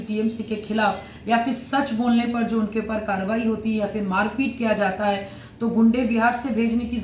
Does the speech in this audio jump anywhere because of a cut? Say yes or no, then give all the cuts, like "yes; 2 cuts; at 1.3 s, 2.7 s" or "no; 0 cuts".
no; 0 cuts